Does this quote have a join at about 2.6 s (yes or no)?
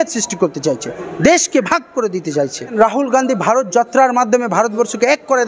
yes